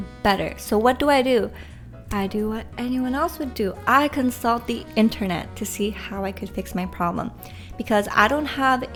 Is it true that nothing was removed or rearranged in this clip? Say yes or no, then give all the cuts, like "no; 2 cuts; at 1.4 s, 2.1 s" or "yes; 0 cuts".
yes; 0 cuts